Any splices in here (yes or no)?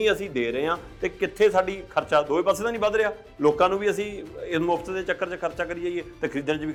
no